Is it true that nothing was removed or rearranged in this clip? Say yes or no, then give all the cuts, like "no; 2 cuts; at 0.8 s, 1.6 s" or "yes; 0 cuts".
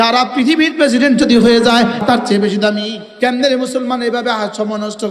no; 2 cuts; at 2.0 s, 3.0 s